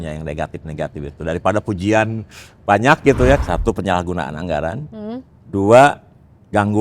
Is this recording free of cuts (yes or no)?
no